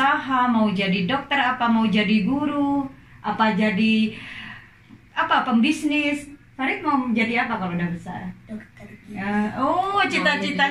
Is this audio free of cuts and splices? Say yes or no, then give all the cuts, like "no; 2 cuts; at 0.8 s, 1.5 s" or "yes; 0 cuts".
yes; 0 cuts